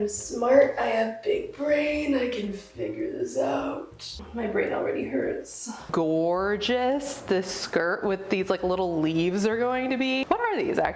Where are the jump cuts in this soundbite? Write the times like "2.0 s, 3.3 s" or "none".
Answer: 4.2 s, 5.9 s, 10.2 s